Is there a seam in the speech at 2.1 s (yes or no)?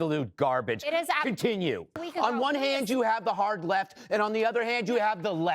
yes